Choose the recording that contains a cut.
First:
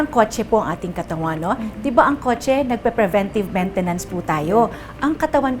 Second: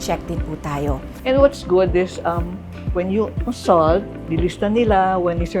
second; 2 cuts; at 1.2 s, 4.2 s

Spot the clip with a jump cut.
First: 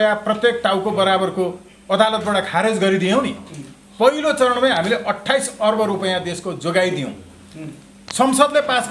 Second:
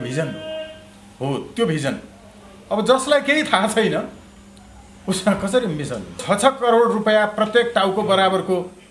second; 1 cut; at 6.2 s

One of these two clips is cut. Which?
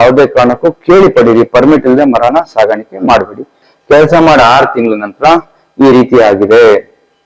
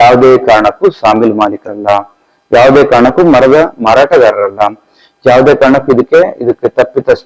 first; 1 cut; at 3.7 s

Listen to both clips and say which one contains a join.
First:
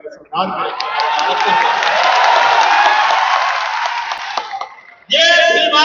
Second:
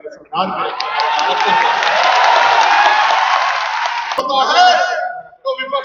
second; 1 cut; at 4.2 s

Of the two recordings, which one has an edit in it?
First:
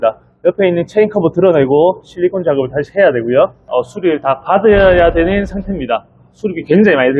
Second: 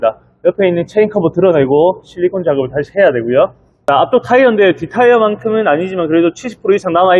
first; 1 cut; at 3.6 s

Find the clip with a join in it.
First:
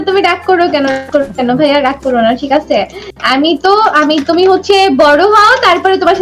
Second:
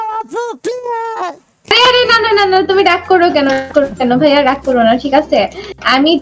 second; 1 cut; at 1.7 s

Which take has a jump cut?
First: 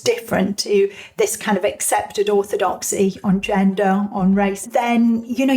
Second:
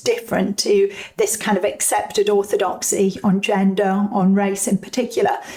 first; 1 cut; at 4.6 s

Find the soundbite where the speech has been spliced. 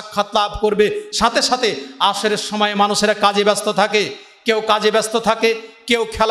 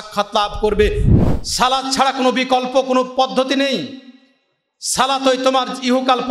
second; 1 cut; at 1.1 s

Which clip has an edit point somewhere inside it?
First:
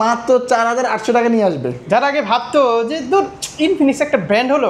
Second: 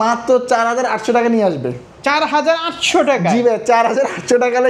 first; 1 cut; at 1.8 s

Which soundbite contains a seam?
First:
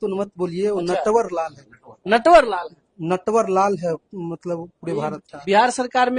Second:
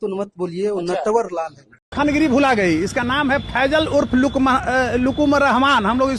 second; 1 cut; at 1.8 s

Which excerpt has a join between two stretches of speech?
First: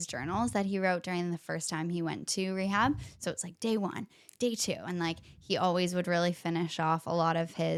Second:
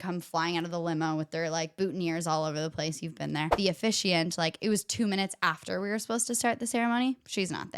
second; 1 cut; at 3.5 s

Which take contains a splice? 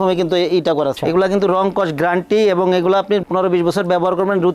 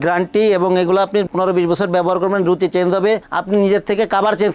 first; 1 cut; at 1.0 s

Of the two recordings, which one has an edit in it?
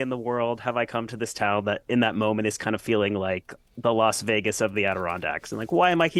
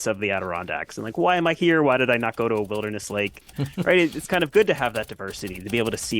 second; 1 cut; at 3.6 s

